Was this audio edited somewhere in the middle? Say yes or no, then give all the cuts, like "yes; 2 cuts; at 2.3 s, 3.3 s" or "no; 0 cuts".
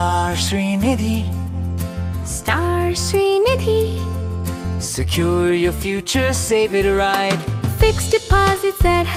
no; 0 cuts